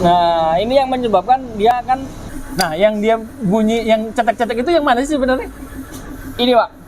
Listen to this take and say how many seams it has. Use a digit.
1